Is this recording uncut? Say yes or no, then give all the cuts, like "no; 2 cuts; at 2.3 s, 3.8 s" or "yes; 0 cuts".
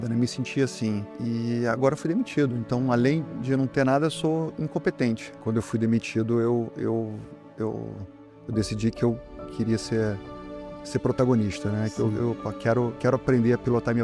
no; 2 cuts; at 1.1 s, 5.3 s